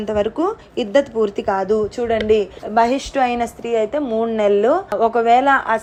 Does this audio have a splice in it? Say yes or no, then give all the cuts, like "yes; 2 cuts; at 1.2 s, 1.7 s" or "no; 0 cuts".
no; 0 cuts